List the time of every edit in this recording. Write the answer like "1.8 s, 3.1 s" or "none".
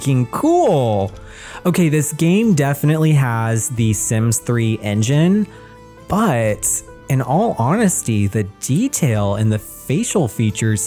none

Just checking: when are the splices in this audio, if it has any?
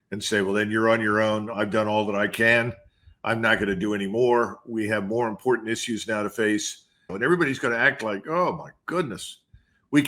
7.1 s

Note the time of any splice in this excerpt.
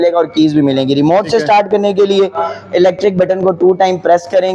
none

